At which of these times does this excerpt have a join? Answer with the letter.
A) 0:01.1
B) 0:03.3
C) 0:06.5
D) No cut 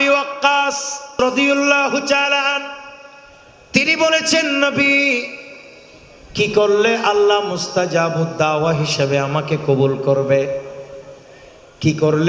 A